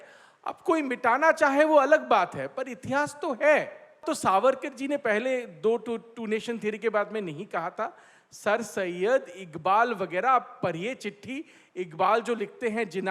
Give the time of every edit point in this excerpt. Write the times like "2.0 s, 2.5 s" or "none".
4.0 s